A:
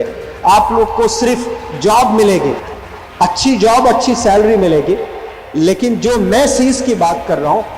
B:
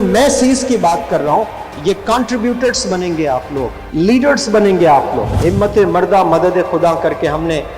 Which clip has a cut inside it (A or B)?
B